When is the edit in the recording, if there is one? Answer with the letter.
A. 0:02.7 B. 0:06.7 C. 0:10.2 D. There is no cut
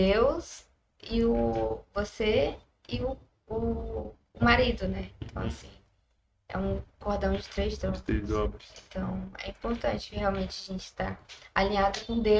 D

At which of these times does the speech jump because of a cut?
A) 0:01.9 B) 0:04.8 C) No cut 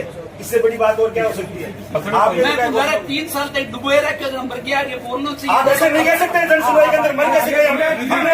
A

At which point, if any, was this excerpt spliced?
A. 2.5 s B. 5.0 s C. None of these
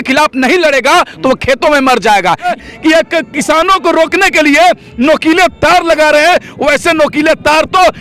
A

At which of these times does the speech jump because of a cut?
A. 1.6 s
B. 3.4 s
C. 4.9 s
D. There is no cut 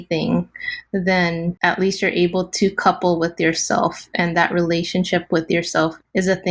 A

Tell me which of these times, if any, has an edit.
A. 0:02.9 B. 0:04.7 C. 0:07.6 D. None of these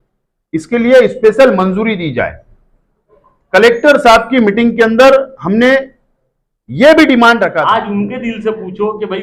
C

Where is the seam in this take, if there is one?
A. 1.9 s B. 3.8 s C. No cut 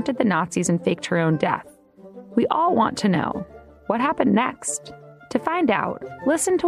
C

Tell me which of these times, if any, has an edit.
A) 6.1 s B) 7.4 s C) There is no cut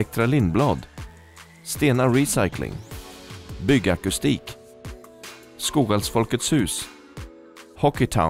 C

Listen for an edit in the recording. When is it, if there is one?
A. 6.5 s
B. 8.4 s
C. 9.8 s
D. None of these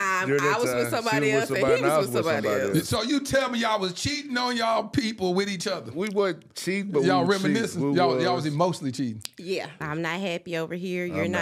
C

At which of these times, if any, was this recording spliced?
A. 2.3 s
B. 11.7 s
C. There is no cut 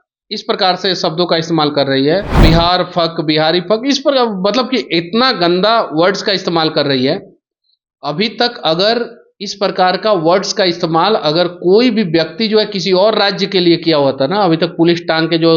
A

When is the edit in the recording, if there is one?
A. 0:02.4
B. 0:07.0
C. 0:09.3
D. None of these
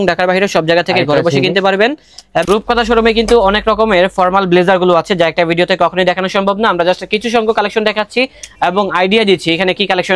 A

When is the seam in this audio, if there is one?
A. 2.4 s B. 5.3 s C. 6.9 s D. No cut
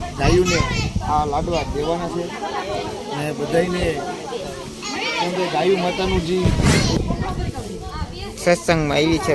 C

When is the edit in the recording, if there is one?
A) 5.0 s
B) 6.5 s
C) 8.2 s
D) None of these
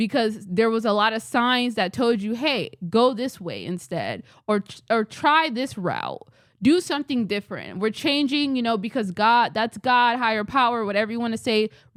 D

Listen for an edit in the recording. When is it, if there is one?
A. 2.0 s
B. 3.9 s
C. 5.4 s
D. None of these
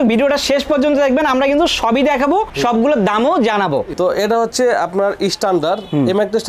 B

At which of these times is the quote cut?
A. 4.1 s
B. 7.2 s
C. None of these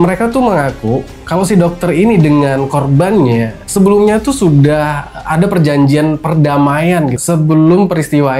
B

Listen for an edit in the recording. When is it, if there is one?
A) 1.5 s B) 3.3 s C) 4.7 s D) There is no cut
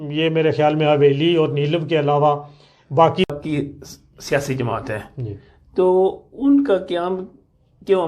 B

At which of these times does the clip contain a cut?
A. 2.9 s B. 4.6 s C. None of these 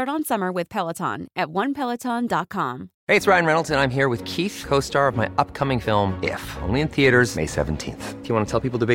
A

